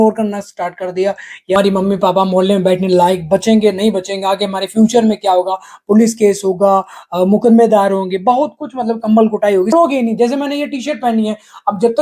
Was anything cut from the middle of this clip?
yes; 2 cuts; at 1.6 s, 9.7 s

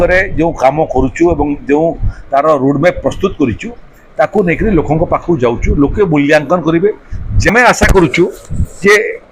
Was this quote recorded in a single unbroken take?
no; 1 cut; at 7.5 s

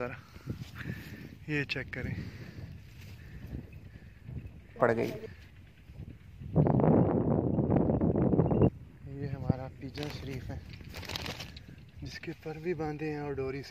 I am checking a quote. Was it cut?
yes; 1 cut; at 8.7 s

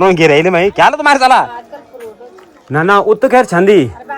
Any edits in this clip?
yes; 1 cut; at 1.5 s

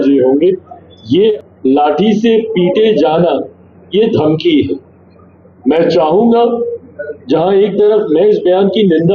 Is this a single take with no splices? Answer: no; 1 cut; at 1.3 s

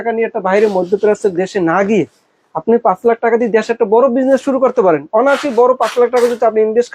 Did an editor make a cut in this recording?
no; 0 cuts

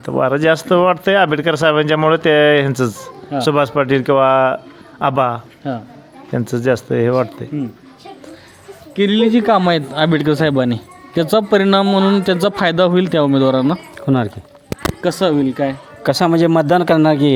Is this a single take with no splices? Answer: yes; 0 cuts

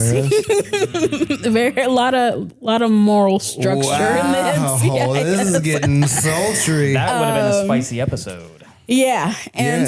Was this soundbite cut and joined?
no; 0 cuts

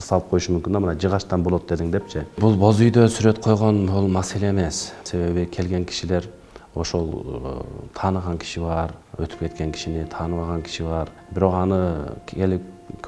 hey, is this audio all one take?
no; 4 cuts; at 2.4 s, 5.0 s, 9.0 s, 11.2 s

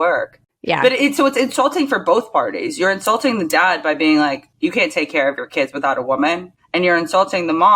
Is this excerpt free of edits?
no; 3 cuts; at 0.8 s, 4.5 s, 6.5 s

